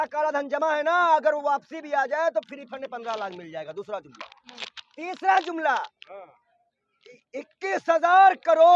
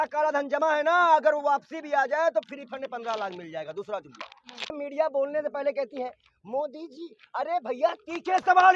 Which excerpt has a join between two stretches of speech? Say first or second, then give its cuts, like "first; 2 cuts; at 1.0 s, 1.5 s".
second; 1 cut; at 4.8 s